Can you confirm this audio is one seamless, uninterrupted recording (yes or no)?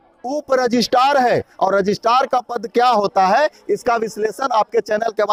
yes